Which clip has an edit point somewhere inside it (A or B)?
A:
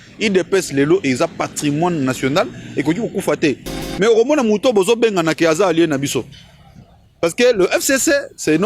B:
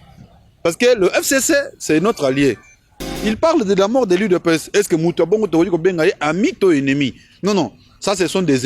B